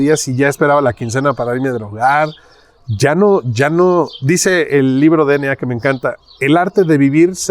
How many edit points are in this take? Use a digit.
0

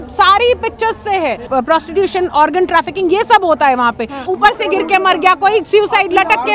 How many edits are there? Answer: 2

